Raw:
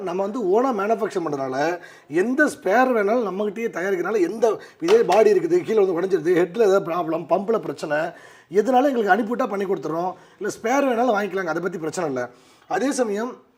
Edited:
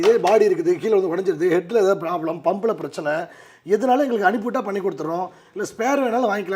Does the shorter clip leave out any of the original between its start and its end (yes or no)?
no